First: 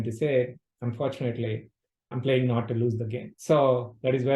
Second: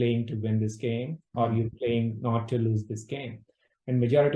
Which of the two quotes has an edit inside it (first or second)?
first